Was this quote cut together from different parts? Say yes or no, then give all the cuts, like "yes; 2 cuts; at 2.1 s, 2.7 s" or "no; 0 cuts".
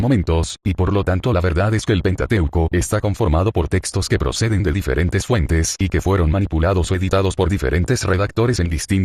yes; 1 cut; at 5.7 s